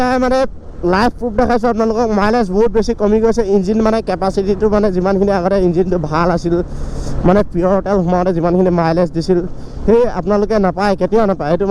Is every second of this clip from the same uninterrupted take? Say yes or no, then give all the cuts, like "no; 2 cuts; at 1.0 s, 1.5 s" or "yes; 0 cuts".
yes; 0 cuts